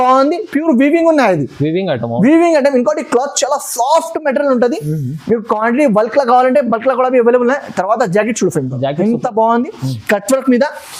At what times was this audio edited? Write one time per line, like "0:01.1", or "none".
none

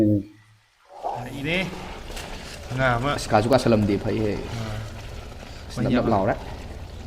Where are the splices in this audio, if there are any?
0:01.3

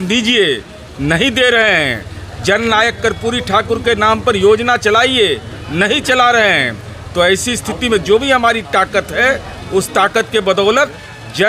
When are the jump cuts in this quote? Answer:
none

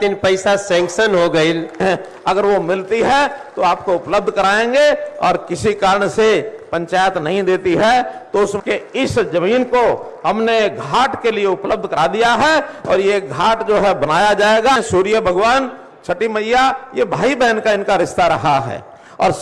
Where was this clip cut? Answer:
0:01.8
0:08.6
0:14.8

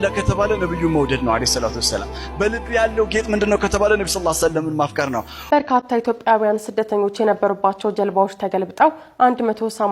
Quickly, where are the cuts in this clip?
0:05.3

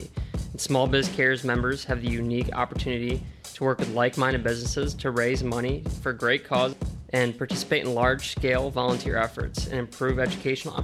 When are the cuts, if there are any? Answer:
0:06.9

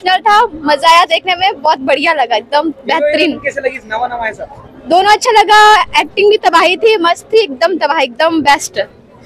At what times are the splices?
none

